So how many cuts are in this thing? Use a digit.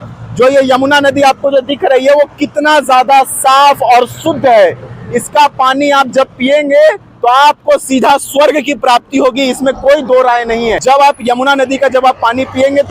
1